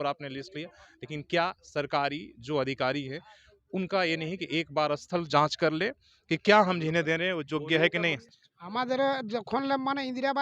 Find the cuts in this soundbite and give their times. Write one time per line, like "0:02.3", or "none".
0:08.3